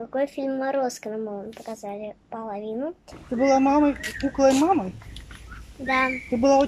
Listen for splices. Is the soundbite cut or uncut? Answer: cut